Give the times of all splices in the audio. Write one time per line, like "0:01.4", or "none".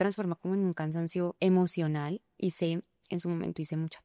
0:01.3